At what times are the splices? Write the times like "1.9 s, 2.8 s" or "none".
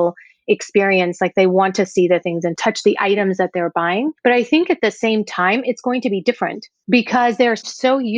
4.1 s, 6.7 s